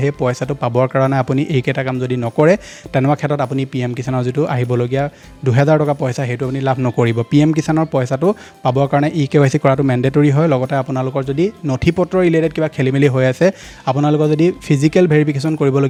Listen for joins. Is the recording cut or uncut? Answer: uncut